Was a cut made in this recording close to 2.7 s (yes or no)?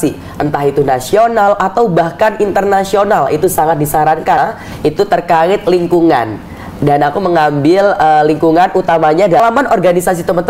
no